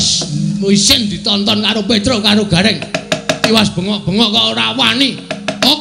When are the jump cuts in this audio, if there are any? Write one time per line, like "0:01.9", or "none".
none